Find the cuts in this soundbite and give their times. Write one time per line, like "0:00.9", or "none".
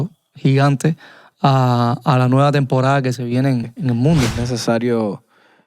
0:04.3